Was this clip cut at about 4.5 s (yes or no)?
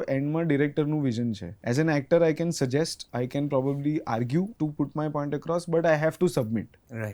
yes